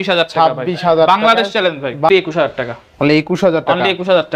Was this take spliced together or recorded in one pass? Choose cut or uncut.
cut